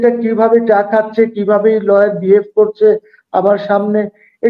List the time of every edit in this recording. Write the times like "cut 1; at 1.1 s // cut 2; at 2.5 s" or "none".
none

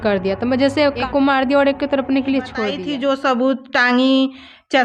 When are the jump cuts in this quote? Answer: cut 1; at 1.0 s // cut 2; at 2.8 s

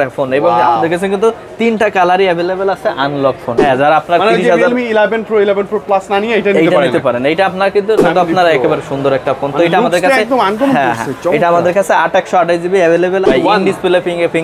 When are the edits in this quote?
cut 1; at 3.5 s // cut 2; at 8.0 s // cut 3; at 13.2 s

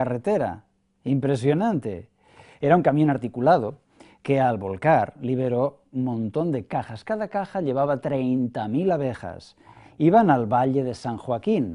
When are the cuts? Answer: cut 1; at 4.2 s

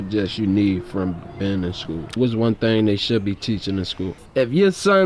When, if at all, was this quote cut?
cut 1; at 2.1 s // cut 2; at 4.2 s

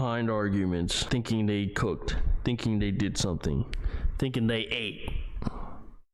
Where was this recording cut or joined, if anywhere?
cut 1; at 1.0 s

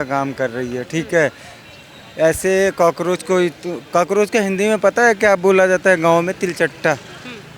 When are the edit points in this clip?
none

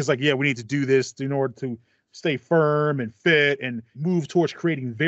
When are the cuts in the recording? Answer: cut 1; at 3.9 s

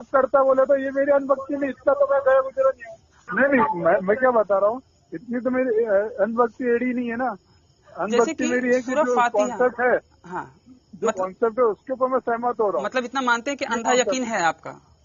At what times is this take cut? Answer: cut 1; at 3.2 s

